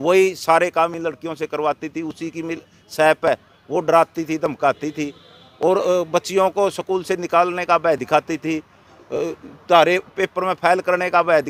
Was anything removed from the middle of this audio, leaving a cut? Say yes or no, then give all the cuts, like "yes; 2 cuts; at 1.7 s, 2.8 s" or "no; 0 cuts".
no; 0 cuts